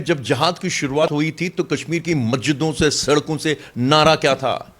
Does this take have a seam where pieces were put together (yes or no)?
yes